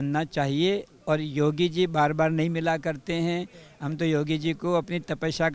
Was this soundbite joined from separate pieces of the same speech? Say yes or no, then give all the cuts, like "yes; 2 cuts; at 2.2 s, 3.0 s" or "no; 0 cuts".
no; 0 cuts